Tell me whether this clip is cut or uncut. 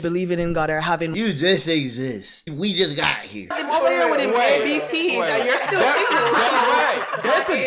cut